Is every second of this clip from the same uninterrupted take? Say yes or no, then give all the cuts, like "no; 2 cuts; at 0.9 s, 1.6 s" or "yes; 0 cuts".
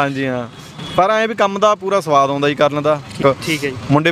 no; 1 cut; at 3.2 s